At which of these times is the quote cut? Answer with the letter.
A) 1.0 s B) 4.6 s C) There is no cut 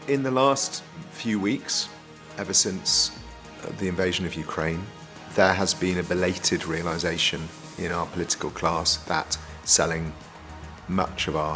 A